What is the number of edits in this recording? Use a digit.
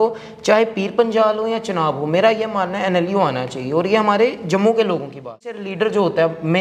1